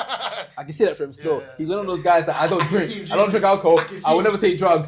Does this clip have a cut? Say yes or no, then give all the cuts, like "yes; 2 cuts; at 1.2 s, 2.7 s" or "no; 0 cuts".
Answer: no; 0 cuts